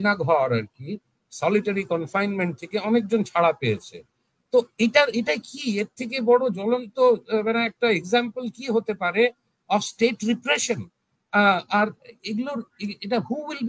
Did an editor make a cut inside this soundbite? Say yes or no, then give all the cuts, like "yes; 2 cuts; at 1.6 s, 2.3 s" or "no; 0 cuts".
no; 0 cuts